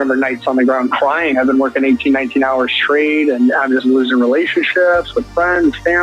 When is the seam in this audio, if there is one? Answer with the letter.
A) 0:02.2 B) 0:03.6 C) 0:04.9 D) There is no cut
D